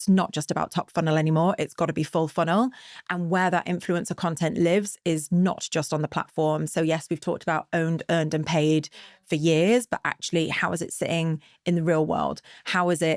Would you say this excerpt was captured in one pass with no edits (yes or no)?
yes